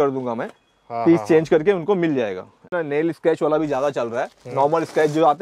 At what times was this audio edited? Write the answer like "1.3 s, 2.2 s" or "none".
2.7 s